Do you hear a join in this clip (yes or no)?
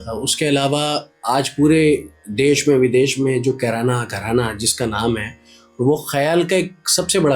no